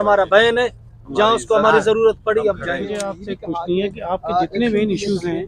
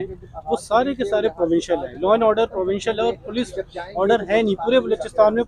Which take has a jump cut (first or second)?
first